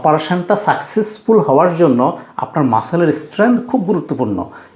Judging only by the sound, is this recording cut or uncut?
uncut